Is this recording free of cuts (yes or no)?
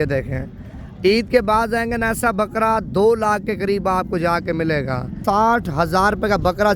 no